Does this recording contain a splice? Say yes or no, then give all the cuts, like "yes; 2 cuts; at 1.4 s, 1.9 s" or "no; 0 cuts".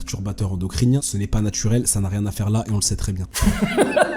yes; 2 cuts; at 1.1 s, 3.2 s